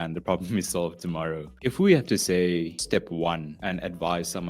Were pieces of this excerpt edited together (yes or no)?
yes